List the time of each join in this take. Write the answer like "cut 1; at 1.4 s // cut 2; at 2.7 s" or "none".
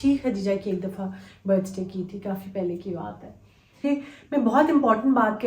cut 1; at 3.8 s